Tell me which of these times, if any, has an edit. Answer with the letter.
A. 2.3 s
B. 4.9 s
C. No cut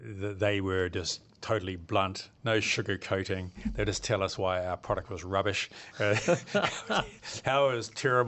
A